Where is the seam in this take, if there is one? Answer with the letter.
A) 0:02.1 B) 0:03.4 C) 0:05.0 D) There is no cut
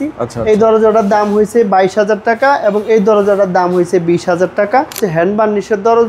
C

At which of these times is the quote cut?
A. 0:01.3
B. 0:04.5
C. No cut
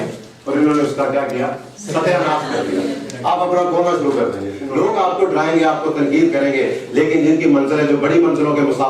B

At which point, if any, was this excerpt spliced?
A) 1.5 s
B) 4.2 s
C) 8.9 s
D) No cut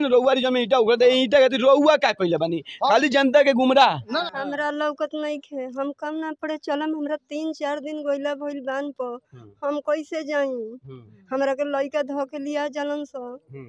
B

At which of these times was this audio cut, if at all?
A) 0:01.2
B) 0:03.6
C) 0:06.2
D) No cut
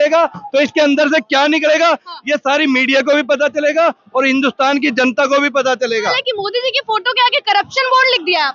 C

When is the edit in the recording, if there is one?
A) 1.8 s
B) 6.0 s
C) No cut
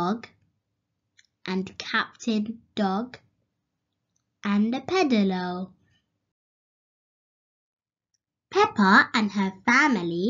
A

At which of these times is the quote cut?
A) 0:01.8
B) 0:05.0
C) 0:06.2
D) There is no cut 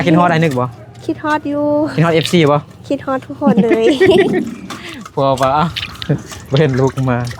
D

